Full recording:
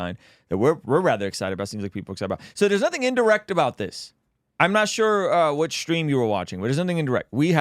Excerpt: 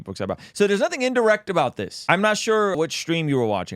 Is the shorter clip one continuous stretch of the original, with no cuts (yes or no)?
no